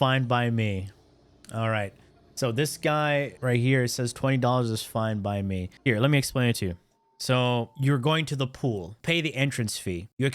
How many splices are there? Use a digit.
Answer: 2